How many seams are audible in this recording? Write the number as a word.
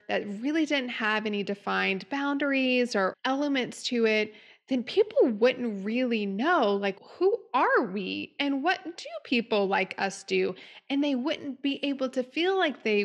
two